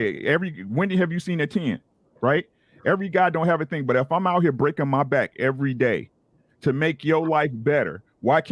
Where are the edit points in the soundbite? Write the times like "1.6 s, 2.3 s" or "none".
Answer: none